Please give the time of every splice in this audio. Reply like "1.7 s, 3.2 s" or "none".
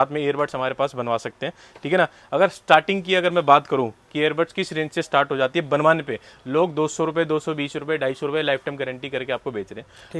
none